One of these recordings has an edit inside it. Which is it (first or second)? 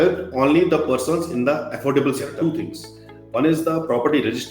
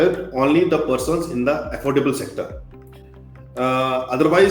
first